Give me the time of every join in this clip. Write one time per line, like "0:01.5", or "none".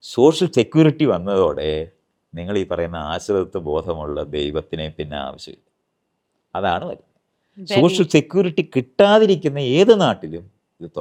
none